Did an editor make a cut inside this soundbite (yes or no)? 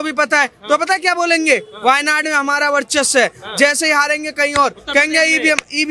no